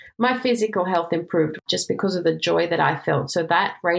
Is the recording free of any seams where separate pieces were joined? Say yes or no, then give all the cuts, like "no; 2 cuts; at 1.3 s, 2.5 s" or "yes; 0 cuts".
no; 1 cut; at 1.6 s